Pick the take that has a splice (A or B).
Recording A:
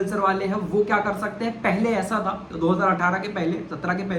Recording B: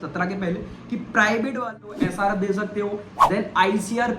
B